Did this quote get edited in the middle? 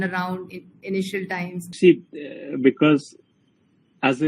yes; 1 cut; at 1.8 s

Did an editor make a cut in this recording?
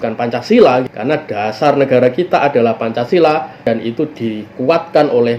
yes; 2 cuts; at 0.8 s, 3.6 s

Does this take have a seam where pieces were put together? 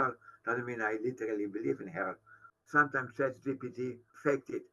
yes; 1 cut; at 2.5 s

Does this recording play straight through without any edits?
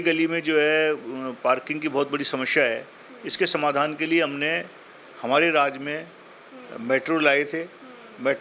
yes; 0 cuts

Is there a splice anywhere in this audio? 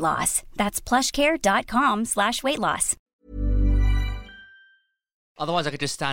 yes; 2 cuts; at 3.1 s, 5.4 s

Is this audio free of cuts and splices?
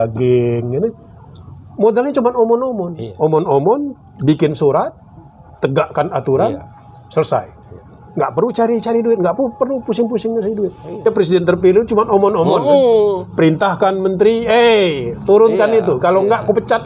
no; 1 cut; at 11.1 s

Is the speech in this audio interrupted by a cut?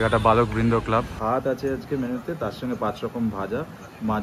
yes; 1 cut; at 1.1 s

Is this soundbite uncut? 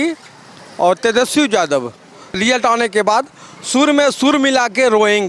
yes; 0 cuts

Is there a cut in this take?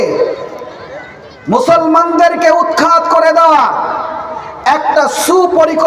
no; 0 cuts

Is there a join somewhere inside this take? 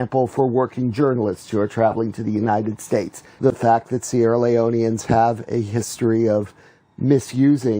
yes; 1 cut; at 3.2 s

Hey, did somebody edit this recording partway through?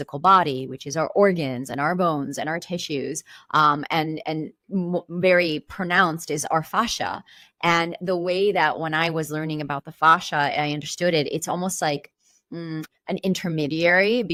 no; 0 cuts

